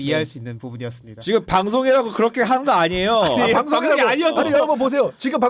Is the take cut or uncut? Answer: uncut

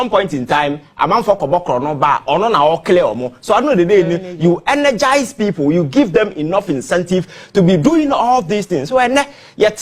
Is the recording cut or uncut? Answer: uncut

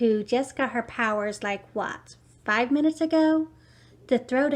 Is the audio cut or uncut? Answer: uncut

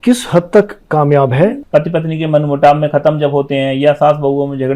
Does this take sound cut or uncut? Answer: cut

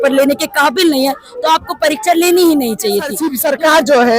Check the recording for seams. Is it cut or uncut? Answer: cut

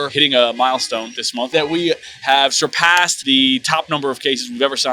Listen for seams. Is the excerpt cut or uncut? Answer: cut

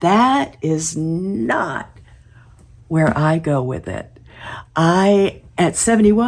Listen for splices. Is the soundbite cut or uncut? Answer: uncut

